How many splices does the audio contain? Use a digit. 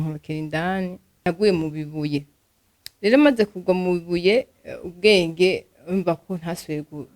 1